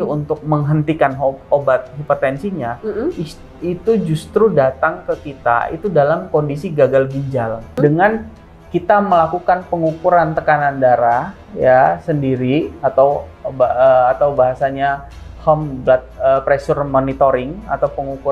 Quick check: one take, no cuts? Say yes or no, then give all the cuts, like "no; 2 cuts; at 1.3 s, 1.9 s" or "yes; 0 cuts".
no; 1 cut; at 7.8 s